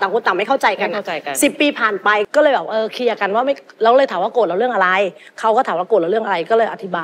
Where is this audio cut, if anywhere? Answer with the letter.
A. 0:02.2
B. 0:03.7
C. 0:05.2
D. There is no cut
A